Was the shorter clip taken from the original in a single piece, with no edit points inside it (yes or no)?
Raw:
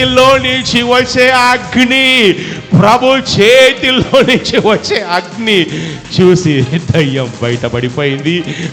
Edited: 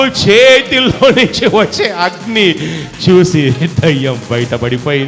yes